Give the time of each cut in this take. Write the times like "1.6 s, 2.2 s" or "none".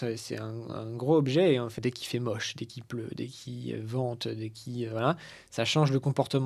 1.7 s